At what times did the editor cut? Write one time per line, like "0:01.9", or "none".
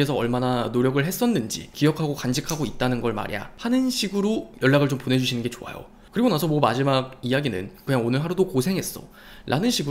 0:01.7
0:03.4
0:07.9